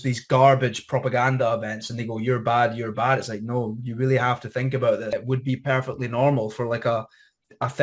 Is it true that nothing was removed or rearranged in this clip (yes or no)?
no